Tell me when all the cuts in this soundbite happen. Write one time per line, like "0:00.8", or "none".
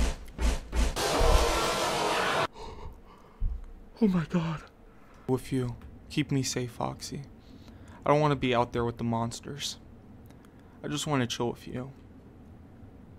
0:05.3